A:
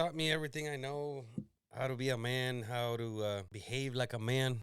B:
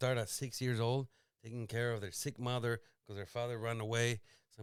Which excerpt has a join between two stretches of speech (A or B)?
A